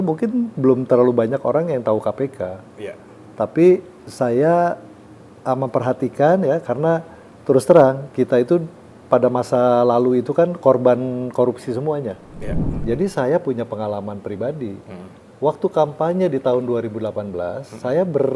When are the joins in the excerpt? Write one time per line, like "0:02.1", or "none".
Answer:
0:12.8